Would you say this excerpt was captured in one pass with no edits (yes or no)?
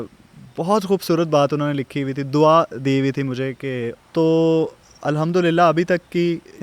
no